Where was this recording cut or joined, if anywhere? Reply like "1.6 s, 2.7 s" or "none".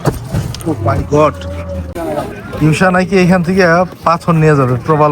1.9 s